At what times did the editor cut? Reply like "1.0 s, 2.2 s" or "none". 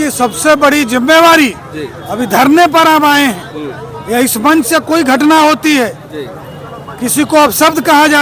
none